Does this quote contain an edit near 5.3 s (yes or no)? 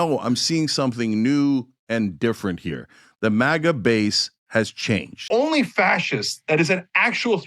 yes